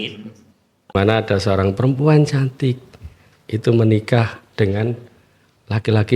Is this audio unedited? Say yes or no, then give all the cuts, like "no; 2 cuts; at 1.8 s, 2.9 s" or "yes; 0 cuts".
no; 1 cut; at 0.9 s